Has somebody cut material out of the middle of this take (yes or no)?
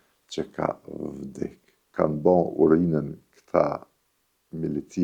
yes